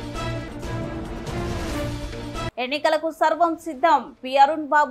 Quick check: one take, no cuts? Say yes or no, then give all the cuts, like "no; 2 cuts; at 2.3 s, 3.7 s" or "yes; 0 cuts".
yes; 0 cuts